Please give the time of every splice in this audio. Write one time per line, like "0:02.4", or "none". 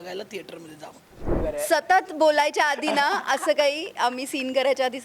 0:01.4